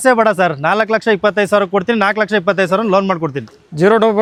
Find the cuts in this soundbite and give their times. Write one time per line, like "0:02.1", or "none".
none